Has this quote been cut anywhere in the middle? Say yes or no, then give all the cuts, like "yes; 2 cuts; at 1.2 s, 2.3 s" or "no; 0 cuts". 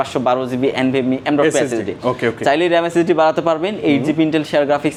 no; 0 cuts